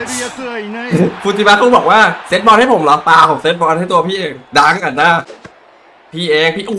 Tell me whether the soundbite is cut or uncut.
cut